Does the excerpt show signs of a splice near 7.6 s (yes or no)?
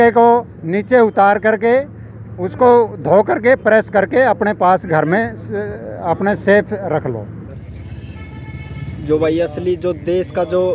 yes